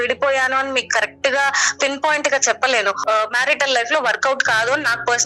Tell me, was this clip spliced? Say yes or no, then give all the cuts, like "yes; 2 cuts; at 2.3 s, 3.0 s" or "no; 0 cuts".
yes; 1 cut; at 3.0 s